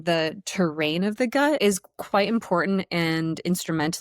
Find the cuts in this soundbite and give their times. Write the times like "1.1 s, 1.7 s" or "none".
1.6 s